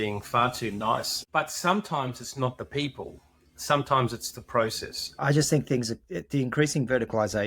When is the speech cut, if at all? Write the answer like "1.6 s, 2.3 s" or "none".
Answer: 1.2 s, 5.2 s